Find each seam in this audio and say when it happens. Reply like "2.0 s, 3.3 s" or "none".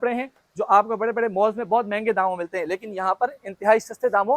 none